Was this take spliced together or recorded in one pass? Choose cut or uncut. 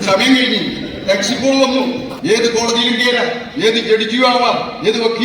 cut